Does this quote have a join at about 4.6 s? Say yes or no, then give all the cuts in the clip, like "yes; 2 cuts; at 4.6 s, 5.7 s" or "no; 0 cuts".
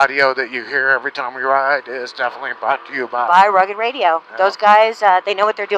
no; 0 cuts